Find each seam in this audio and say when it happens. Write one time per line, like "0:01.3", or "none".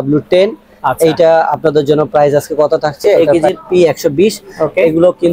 0:03.3